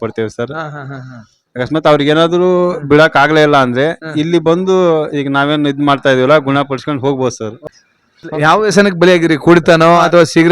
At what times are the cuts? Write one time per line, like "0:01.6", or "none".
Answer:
0:07.6